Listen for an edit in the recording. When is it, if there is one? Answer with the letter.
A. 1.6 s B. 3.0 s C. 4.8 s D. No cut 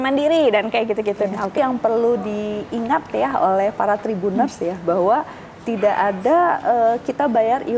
A